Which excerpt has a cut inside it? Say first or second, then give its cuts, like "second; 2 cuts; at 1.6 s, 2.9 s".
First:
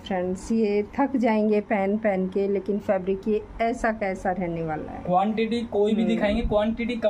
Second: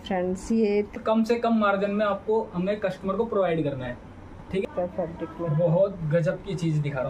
second; 2 cuts; at 1.0 s, 4.6 s